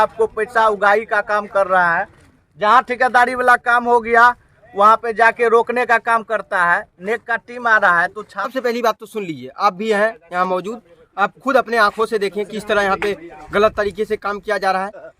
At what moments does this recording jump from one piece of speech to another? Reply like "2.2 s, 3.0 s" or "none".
8.5 s

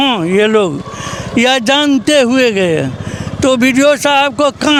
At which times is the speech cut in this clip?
none

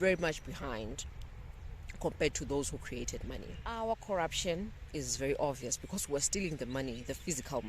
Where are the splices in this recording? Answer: 3.8 s

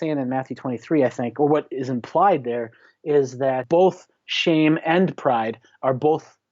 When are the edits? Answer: 3.6 s

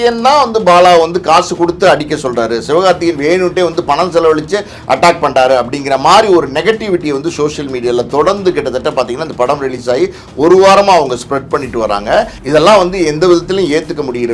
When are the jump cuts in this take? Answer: 12.4 s

